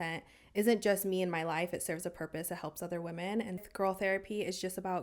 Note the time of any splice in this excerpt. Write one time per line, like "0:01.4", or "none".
0:03.6